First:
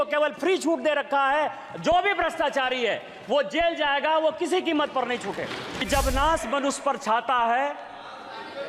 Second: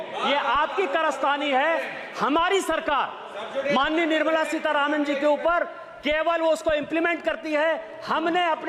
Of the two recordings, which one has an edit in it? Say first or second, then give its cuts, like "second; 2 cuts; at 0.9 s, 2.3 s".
first; 1 cut; at 5.8 s